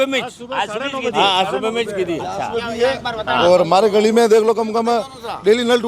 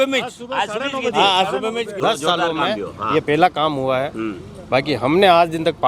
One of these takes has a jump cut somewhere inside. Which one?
second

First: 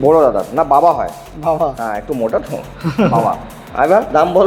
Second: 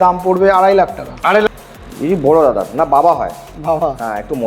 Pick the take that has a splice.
second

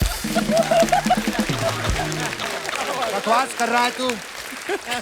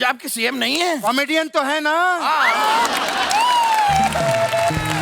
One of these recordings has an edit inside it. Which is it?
first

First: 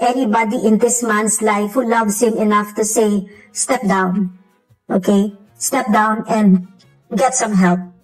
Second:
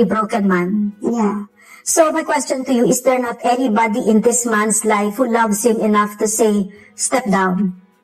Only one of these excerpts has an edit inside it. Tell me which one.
second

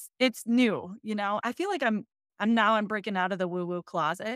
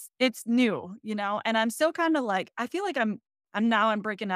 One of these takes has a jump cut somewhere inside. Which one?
first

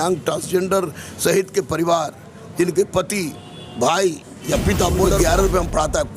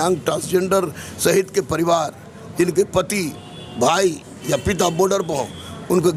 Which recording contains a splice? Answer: first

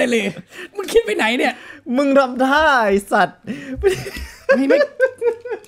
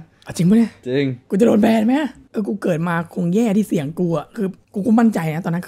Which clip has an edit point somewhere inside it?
second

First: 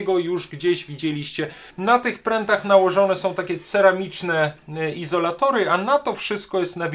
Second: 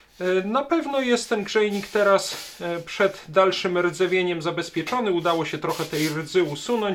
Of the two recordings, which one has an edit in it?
first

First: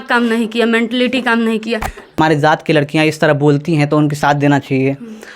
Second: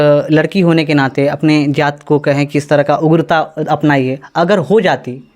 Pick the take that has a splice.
first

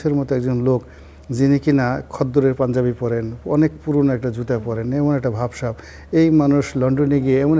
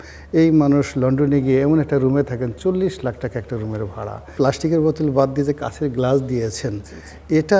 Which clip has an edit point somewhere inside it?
second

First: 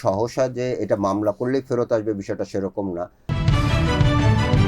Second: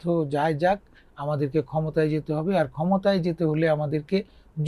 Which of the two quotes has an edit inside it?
first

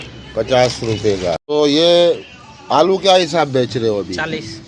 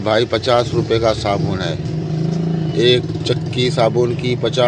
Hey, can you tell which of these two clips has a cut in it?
first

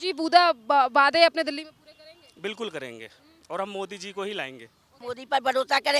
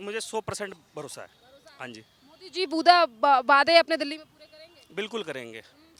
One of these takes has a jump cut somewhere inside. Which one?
first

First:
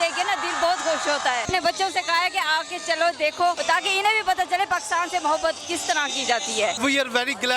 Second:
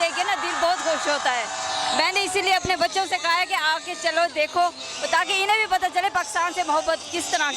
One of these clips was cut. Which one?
first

